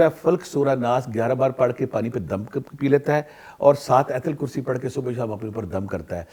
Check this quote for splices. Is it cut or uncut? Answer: uncut